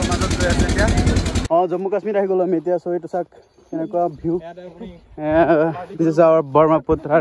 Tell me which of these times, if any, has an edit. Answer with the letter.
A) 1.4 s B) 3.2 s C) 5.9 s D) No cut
A